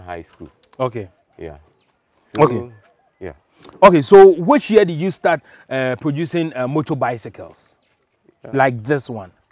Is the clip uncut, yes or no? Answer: yes